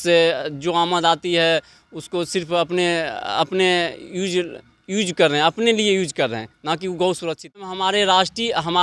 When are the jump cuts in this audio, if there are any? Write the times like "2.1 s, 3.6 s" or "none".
7.7 s